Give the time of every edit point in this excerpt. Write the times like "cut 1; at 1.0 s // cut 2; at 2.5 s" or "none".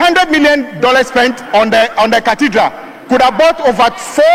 none